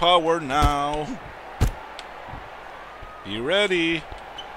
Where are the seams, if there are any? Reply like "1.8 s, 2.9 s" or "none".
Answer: none

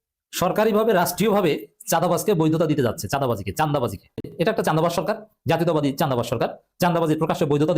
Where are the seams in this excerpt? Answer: 4.3 s

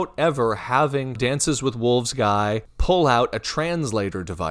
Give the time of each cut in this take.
1.2 s, 2.7 s

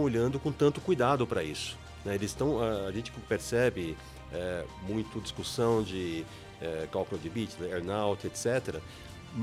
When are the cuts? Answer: none

